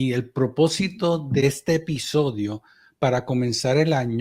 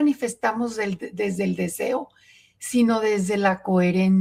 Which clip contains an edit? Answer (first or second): first